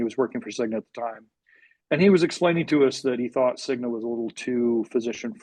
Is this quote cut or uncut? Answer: uncut